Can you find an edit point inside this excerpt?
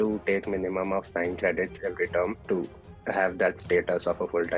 yes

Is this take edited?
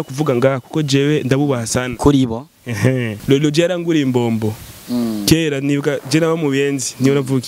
yes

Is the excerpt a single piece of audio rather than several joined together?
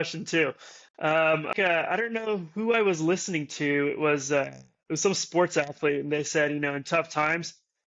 no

